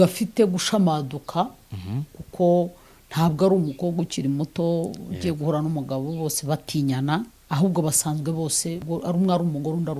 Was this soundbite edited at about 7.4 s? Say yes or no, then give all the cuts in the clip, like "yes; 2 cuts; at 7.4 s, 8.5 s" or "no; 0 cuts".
yes; 2 cuts; at 7.4 s, 8.8 s